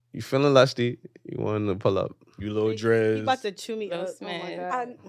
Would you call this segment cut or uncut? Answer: uncut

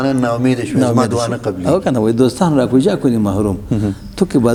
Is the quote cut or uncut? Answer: uncut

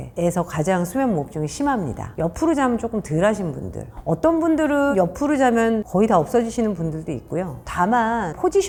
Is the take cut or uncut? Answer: uncut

